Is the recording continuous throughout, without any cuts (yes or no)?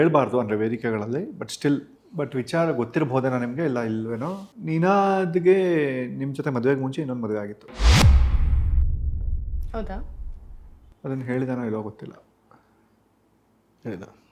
yes